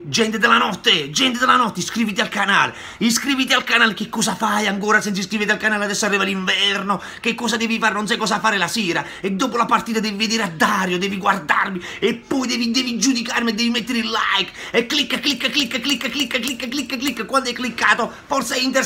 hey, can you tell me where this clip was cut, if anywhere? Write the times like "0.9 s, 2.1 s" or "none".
none